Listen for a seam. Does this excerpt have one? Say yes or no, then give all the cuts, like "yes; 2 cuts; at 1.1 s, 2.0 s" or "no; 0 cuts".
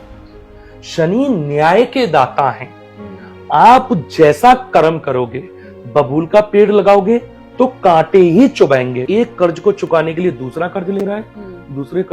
yes; 1 cut; at 9.0 s